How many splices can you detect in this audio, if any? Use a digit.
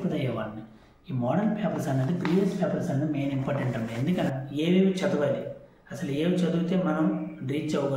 1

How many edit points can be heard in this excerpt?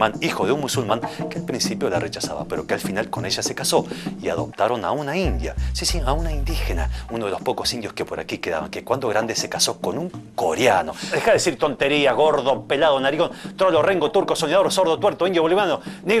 1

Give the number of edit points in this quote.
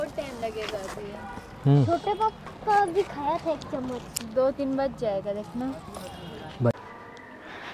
1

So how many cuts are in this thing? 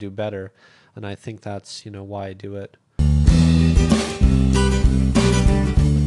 1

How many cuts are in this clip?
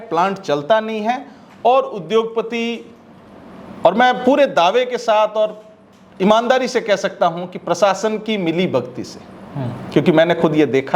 0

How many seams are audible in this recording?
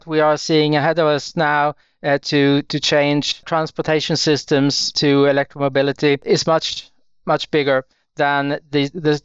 3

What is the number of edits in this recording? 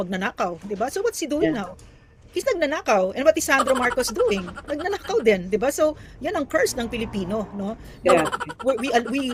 0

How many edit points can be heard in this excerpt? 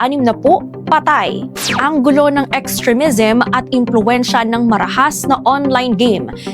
1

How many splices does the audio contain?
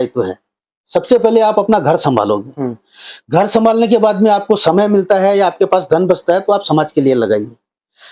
0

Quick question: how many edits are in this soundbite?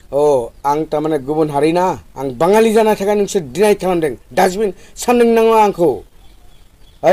0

